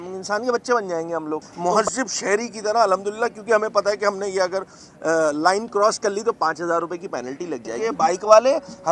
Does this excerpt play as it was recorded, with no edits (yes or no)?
no